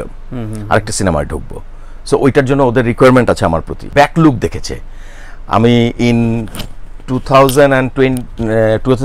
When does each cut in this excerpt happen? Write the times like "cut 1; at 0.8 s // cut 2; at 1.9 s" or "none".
cut 1; at 3.7 s